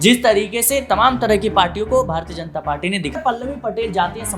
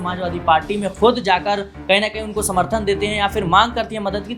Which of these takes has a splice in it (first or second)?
first